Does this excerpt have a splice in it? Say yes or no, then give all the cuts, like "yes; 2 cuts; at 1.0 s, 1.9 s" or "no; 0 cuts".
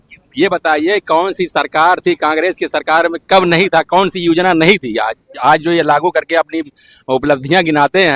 no; 0 cuts